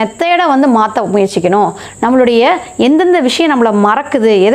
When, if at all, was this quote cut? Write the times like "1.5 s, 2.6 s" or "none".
none